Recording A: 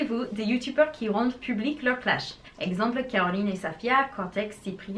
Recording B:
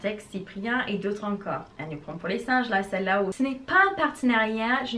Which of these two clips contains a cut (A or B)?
B